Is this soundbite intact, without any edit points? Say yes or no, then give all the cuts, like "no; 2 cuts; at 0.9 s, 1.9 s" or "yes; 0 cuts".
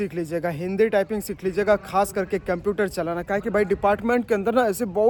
yes; 0 cuts